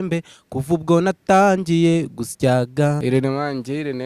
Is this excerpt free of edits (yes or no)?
no